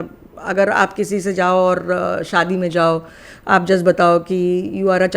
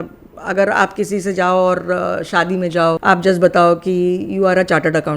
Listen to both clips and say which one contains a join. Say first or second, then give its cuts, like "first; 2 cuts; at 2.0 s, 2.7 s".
second; 1 cut; at 3.0 s